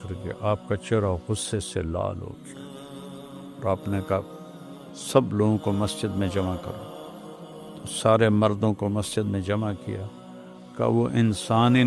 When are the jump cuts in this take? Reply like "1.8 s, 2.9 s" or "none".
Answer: none